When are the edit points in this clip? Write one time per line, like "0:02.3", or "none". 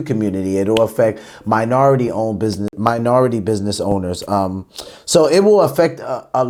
none